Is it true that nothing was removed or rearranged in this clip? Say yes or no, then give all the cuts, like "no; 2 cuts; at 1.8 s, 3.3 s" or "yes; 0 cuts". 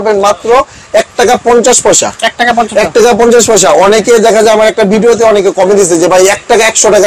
yes; 0 cuts